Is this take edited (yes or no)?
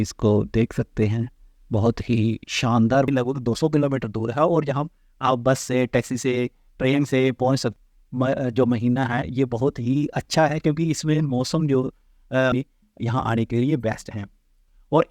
yes